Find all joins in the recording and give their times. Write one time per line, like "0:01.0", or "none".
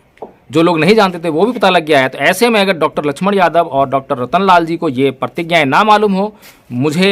none